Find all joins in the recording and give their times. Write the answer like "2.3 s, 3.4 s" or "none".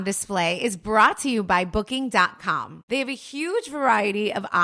2.7 s